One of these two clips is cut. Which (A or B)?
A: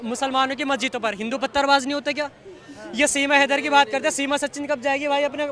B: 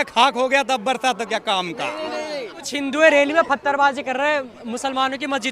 B